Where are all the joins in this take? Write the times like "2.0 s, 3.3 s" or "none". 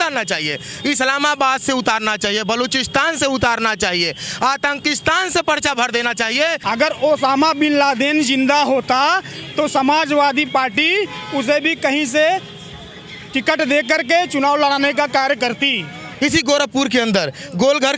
6.6 s, 16.1 s